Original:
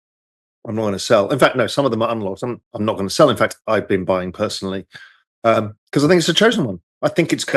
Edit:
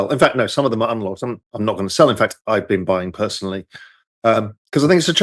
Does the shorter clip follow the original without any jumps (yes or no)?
yes